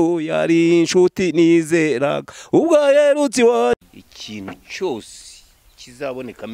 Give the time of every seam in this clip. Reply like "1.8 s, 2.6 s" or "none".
3.8 s